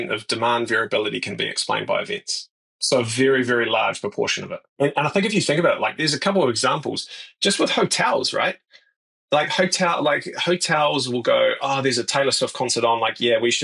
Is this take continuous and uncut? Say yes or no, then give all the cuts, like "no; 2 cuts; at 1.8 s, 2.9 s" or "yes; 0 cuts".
yes; 0 cuts